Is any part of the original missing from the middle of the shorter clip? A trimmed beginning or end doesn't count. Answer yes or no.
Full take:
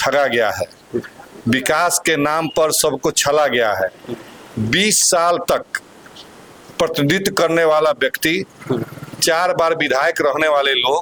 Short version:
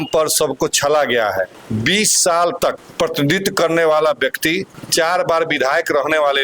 yes